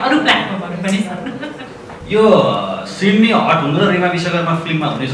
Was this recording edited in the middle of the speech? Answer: yes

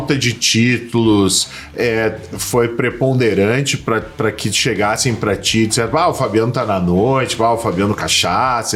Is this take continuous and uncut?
yes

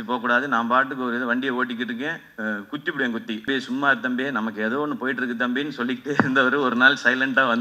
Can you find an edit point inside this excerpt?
yes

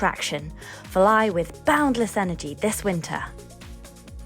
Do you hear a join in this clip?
yes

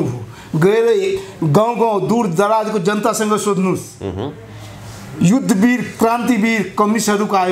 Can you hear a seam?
no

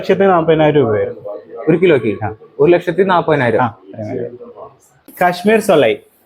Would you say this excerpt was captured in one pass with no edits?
no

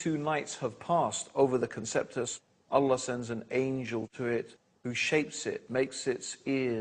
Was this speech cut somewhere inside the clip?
no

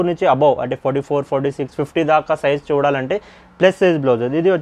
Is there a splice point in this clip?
no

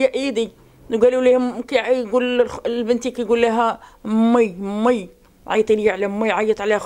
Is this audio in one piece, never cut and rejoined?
yes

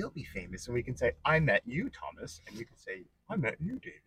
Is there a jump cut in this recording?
no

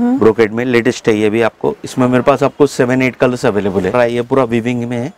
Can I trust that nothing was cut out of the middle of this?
no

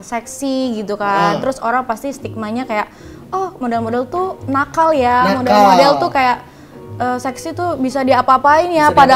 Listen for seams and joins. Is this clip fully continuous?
yes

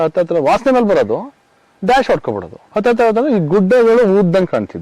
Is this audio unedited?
yes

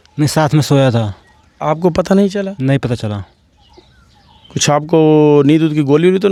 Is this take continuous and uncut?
yes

